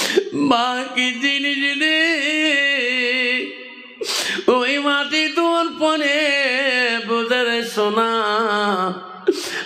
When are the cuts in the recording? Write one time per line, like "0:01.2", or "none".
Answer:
none